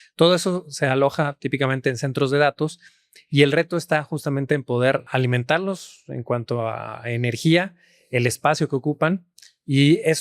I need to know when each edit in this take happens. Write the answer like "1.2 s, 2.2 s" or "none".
5.1 s